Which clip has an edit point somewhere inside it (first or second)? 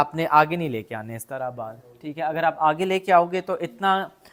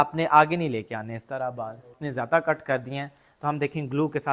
second